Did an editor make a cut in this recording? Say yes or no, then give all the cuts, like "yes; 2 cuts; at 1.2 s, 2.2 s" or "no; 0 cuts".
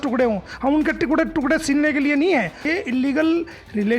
yes; 1 cut; at 2.7 s